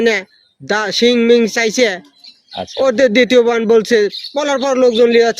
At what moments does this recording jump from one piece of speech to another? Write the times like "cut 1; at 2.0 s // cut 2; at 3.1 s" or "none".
none